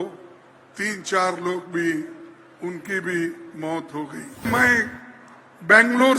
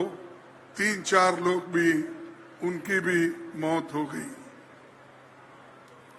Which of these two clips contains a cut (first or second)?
first